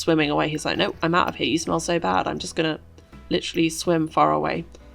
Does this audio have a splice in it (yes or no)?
no